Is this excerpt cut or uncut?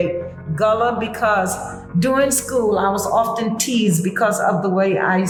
uncut